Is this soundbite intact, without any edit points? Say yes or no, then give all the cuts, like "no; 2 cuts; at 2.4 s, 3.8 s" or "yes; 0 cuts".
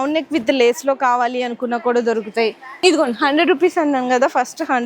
no; 1 cut; at 2.8 s